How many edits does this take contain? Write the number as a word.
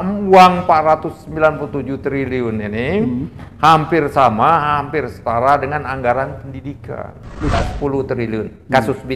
one